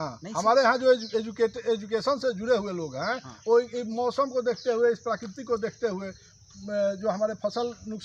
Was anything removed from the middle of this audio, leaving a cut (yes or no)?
no